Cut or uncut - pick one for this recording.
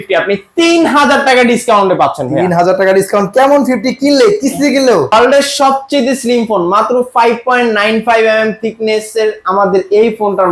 cut